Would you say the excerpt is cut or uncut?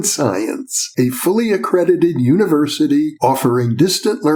uncut